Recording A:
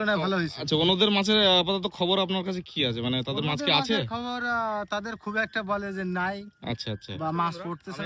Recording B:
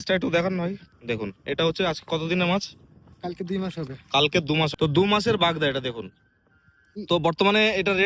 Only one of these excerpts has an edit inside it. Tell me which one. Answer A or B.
B